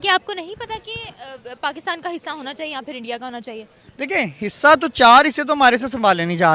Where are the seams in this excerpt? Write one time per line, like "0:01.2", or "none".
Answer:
none